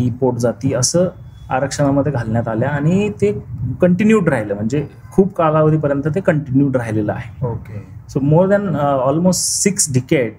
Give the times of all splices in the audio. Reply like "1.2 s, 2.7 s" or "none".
none